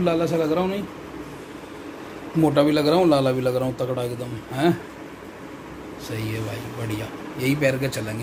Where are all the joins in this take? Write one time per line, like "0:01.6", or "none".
none